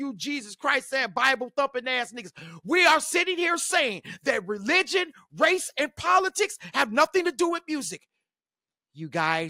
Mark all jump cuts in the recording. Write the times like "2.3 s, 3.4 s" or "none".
none